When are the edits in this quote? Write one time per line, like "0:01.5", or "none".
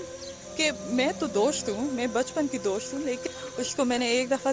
0:03.3